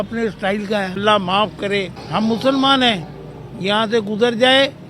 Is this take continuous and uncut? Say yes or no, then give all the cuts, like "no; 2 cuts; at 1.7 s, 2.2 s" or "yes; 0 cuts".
no; 2 cuts; at 1.0 s, 2.0 s